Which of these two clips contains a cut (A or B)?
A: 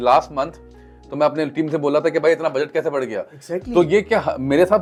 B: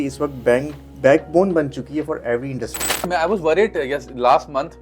B